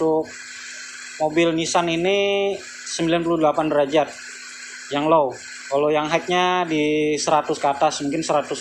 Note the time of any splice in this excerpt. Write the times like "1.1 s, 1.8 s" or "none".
none

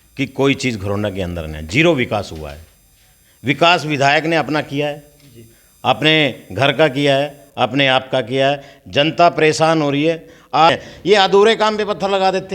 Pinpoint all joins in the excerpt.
10.7 s

